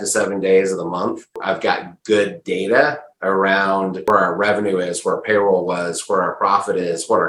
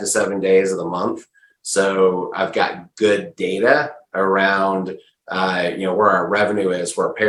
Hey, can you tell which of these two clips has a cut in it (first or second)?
first